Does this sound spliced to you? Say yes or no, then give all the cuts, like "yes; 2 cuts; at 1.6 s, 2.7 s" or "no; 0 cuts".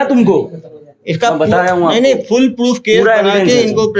no; 0 cuts